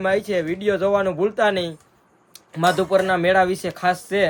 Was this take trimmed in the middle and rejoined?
no; 0 cuts

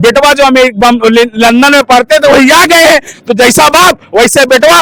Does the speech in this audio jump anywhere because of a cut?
no; 0 cuts

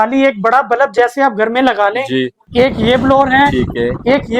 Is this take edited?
yes; 1 cut; at 2.4 s

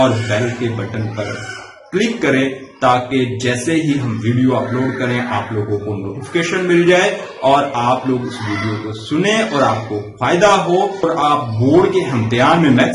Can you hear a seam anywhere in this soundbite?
yes; 1 cut; at 11.0 s

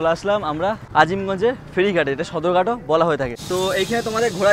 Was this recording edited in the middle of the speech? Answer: yes; 2 cuts; at 0.8 s, 3.4 s

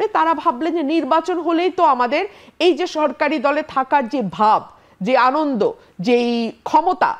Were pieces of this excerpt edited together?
no; 0 cuts

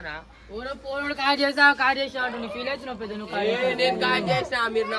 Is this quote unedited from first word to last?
no; 1 cut; at 3.2 s

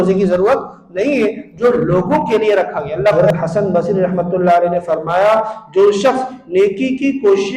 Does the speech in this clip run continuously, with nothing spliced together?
no; 1 cut; at 3.1 s

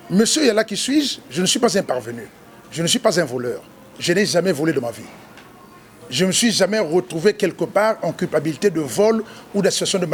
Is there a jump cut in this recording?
no; 0 cuts

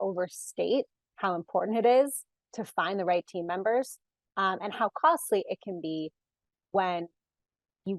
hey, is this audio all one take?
yes; 0 cuts

